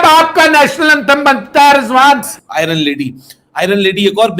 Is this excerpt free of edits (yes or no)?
no